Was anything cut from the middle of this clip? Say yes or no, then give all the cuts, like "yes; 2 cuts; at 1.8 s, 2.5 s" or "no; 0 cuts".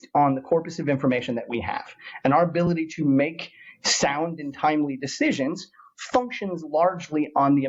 no; 0 cuts